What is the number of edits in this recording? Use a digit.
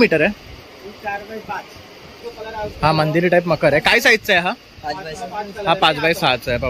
1